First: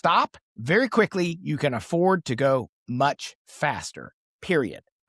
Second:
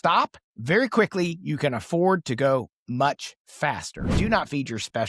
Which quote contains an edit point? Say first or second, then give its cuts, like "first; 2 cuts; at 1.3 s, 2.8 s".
second; 1 cut; at 4.1 s